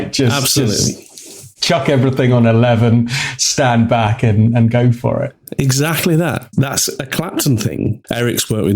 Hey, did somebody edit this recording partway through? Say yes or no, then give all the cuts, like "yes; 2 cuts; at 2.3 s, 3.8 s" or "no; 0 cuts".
yes; 2 cuts; at 6.4 s, 8.0 s